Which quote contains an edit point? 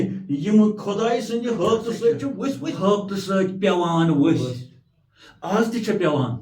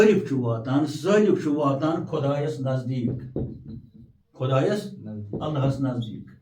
first; 1 cut; at 2.7 s

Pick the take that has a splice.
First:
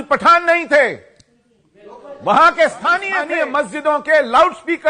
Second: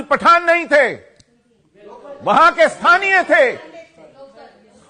first; 1 cut; at 3.2 s

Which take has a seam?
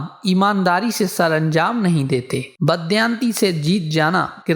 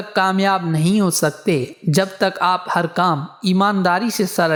first; 1 cut; at 2.5 s

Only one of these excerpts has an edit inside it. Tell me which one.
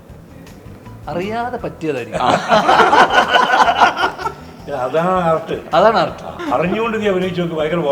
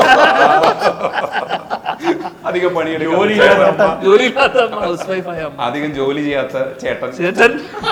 first; 1 cut; at 6.3 s

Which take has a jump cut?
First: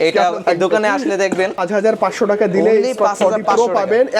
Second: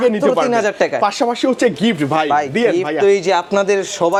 first; 1 cut; at 1.6 s

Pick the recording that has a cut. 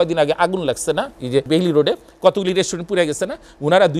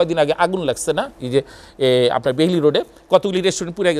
first; 1 cut; at 1.5 s

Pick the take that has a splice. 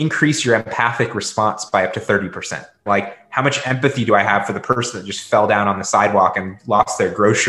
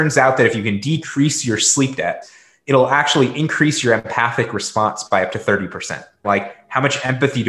second; 1 cut; at 2.2 s

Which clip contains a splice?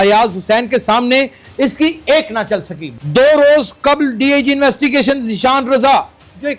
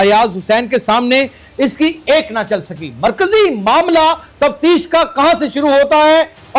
first; 1 cut; at 2.9 s

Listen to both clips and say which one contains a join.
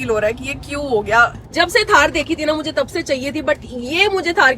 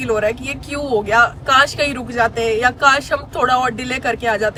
first; 1 cut; at 1.4 s

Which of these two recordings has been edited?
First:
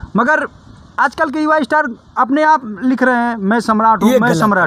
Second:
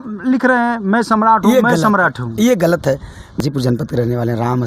second; 1 cut; at 3.4 s

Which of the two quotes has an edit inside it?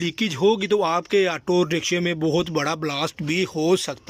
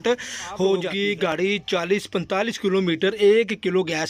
second; 1 cut; at 1.3 s

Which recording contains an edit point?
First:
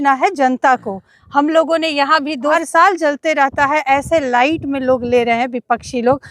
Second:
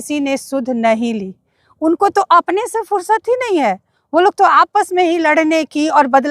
first; 1 cut; at 2.5 s

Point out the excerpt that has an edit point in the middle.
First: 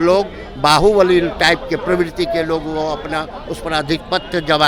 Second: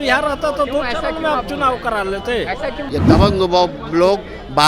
second; 1 cut; at 2.8 s

